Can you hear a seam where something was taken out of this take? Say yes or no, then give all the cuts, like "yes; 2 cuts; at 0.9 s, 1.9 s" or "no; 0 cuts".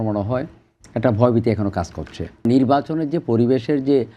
yes; 1 cut; at 2.4 s